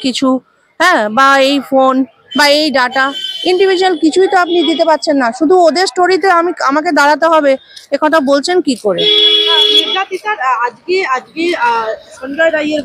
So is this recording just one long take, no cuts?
yes; 0 cuts

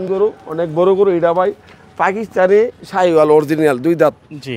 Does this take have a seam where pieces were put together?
no; 0 cuts

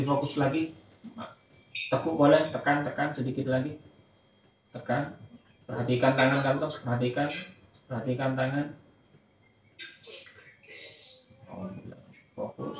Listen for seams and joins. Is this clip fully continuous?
yes; 0 cuts

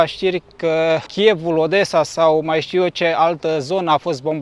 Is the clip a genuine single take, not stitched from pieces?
no; 1 cut; at 1.1 s

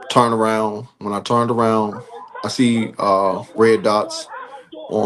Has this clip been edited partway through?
no; 0 cuts

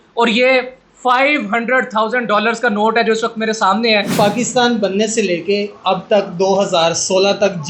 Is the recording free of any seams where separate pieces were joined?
no; 1 cut; at 4.1 s

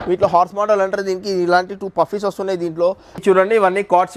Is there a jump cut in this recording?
yes; 1 cut; at 3.2 s

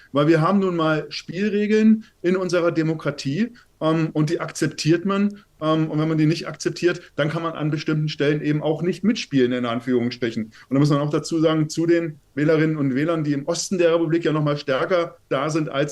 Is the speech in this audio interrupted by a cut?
yes; 1 cut; at 10.6 s

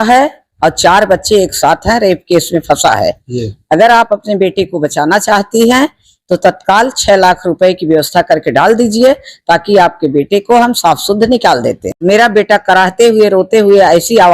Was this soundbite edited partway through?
yes; 1 cut; at 11.9 s

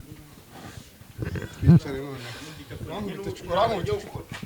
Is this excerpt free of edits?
yes; 0 cuts

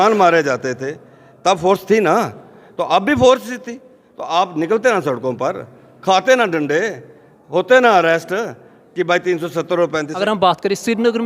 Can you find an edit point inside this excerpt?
yes; 1 cut; at 10.1 s

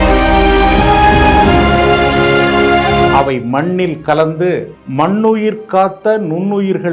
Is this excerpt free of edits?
yes; 0 cuts

